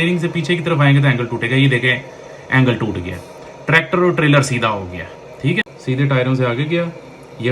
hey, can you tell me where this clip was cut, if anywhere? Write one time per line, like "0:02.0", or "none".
0:05.6